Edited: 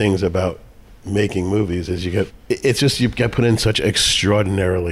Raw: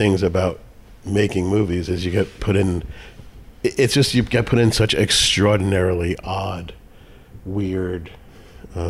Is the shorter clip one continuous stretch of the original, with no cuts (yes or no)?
no